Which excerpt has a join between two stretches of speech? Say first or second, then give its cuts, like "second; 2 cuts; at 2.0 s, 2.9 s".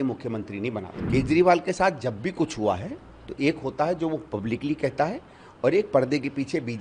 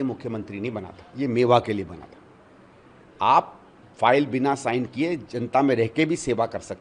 first; 1 cut; at 0.9 s